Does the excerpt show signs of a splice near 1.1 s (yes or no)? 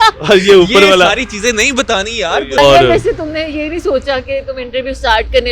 no